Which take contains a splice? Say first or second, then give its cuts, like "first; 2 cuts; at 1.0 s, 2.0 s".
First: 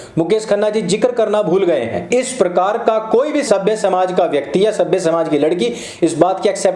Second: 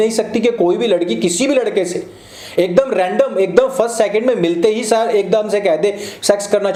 first; 1 cut; at 2.1 s